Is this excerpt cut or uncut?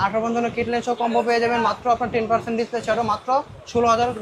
uncut